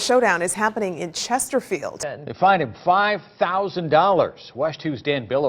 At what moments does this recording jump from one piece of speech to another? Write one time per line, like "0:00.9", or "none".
0:01.9